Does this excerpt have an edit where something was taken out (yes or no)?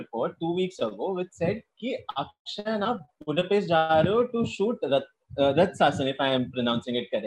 no